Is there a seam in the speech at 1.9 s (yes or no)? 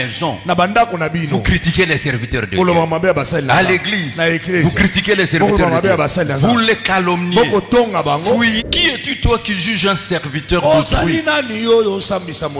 no